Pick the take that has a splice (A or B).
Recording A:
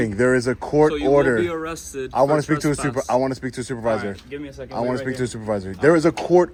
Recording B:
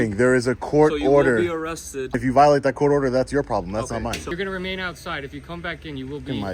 B